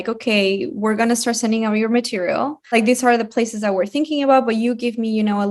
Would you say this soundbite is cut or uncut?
cut